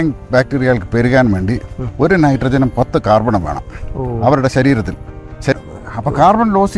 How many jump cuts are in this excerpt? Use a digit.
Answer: 1